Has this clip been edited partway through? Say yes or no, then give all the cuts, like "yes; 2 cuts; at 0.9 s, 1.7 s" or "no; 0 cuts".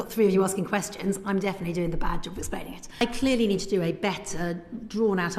yes; 1 cut; at 3.0 s